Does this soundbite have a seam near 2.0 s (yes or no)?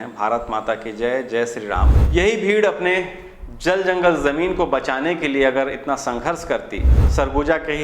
yes